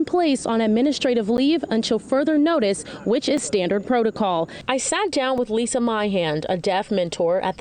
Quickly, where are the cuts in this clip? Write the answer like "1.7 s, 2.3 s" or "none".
4.6 s